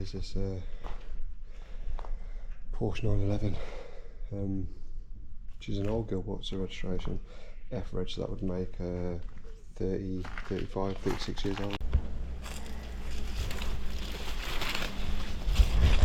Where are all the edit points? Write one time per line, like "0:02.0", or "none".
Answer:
0:11.8